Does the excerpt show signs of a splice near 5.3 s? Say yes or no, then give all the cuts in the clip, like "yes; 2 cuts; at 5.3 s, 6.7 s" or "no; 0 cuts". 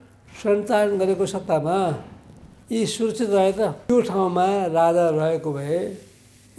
no; 1 cut; at 3.9 s